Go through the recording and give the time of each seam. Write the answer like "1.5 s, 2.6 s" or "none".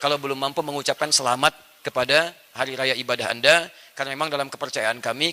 none